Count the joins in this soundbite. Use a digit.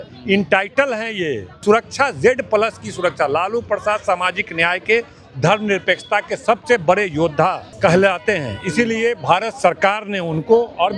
2